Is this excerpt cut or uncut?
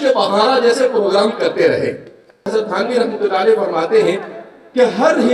cut